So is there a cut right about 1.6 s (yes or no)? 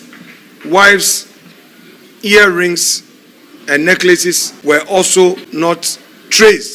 no